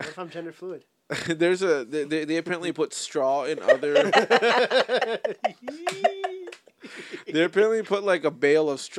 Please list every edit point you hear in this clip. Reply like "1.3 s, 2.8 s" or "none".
none